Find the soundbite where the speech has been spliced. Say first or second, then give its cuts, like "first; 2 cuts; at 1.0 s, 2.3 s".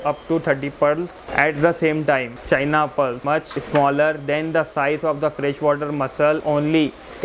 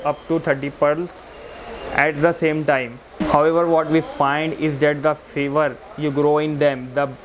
first; 4 cuts; at 1.2 s, 2.3 s, 3.3 s, 6.4 s